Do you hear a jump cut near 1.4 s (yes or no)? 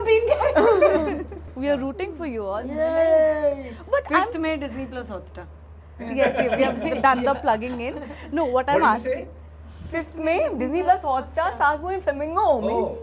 yes